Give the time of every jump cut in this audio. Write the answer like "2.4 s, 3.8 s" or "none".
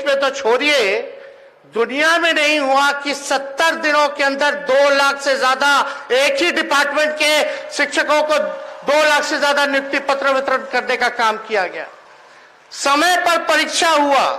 none